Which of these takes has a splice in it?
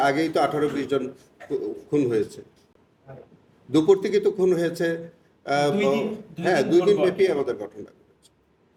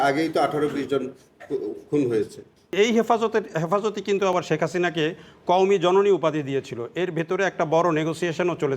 second; 1 cut; at 2.7 s

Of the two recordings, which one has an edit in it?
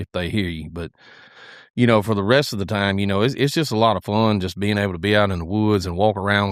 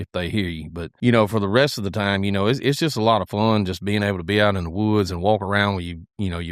second; 1 cut; at 0.9 s

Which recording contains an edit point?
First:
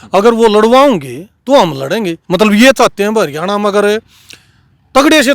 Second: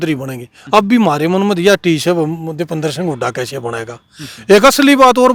first; 1 cut; at 2.2 s

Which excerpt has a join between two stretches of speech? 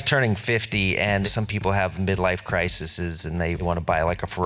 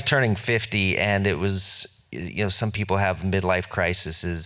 first; 1 cut; at 1.2 s

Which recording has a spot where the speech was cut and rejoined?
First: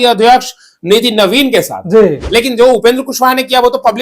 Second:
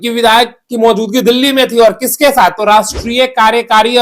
first; 1 cut; at 2.2 s

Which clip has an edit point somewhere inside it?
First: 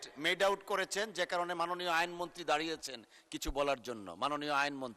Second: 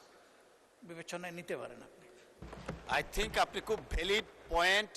second; 1 cut; at 2.4 s

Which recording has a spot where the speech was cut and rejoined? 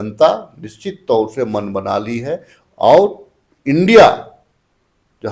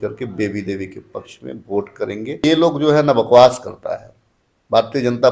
second; 1 cut; at 2.4 s

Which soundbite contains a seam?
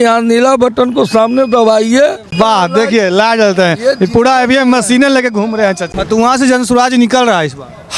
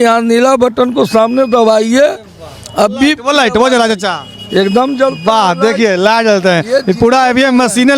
first; 2 cuts; at 2.3 s, 5.9 s

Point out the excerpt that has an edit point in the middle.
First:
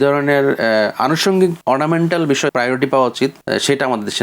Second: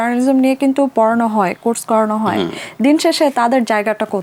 first; 3 cuts; at 1.6 s, 2.5 s, 3.4 s

